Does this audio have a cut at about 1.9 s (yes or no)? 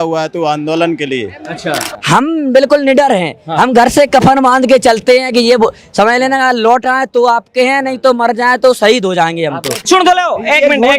yes